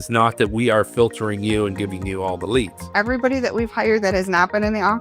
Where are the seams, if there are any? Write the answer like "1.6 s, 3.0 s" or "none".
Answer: 2.8 s